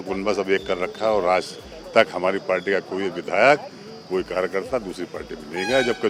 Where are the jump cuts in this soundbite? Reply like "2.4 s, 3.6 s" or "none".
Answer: none